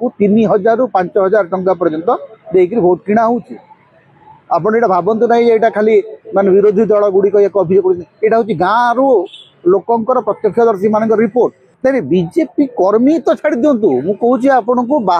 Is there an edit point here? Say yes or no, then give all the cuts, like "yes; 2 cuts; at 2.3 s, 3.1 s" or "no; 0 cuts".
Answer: yes; 1 cut; at 11.7 s